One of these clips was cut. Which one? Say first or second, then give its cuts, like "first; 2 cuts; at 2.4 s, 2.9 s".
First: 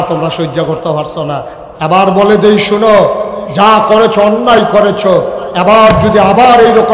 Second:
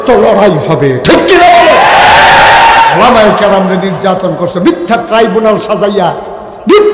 second; 1 cut; at 2.9 s